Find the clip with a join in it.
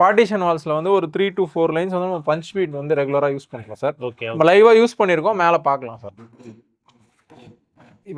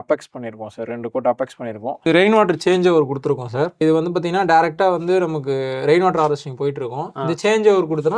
second; 2 cuts; at 1.9 s, 3.8 s

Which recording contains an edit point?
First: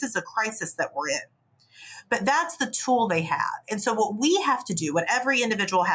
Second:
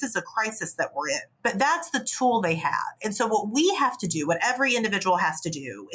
second; 1 cut; at 1.3 s

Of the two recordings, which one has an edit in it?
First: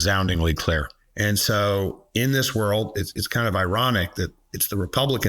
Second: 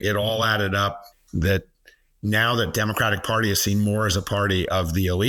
first; 1 cut; at 1.0 s

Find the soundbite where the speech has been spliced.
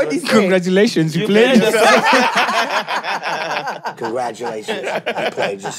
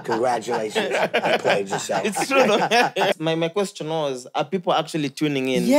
second; 1 cut; at 3.1 s

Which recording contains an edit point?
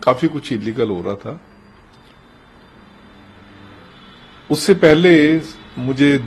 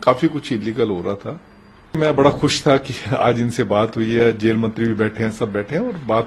second; 1 cut; at 2.0 s

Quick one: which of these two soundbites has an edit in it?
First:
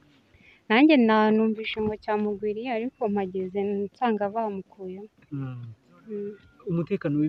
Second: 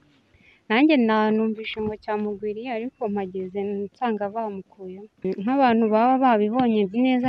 second; 1 cut; at 5.2 s

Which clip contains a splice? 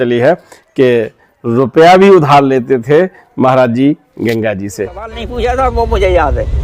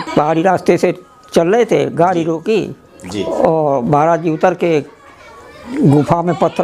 first; 1 cut; at 5.1 s

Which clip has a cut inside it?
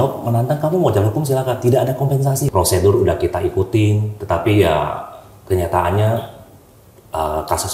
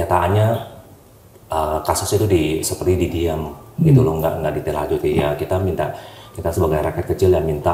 first; 1 cut; at 2.4 s

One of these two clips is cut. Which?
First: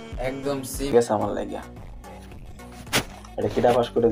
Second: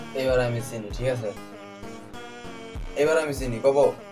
first; 1 cut; at 0.9 s

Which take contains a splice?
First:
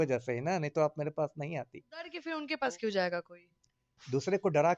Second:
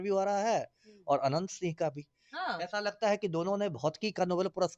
first; 1 cut; at 2.3 s

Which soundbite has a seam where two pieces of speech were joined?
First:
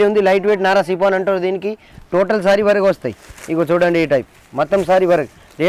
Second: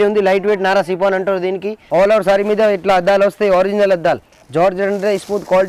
second; 2 cuts; at 1.7 s, 4.4 s

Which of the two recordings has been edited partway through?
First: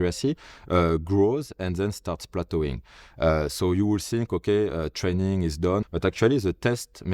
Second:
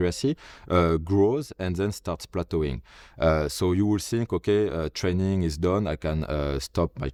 first; 1 cut; at 5.8 s

